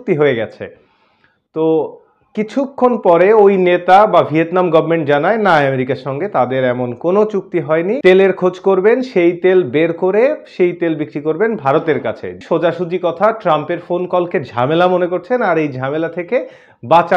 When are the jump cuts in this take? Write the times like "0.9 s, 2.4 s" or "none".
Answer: 8.0 s, 12.4 s